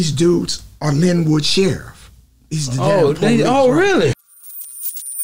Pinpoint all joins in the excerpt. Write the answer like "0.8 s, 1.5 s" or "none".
4.2 s